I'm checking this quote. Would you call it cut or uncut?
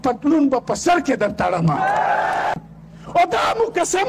cut